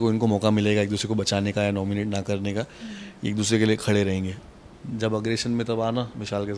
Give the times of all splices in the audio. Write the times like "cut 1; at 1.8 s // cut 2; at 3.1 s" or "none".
cut 1; at 4.3 s